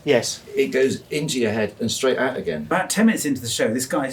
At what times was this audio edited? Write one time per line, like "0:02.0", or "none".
0:02.7